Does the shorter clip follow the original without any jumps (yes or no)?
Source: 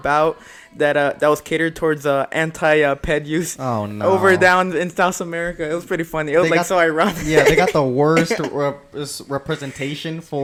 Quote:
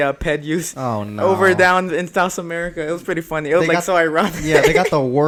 yes